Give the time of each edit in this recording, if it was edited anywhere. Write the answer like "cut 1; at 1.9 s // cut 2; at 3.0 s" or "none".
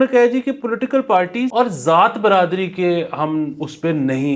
cut 1; at 1.5 s